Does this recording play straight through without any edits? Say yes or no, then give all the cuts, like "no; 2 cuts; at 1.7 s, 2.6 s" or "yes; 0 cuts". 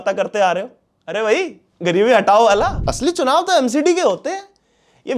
no; 1 cut; at 2.7 s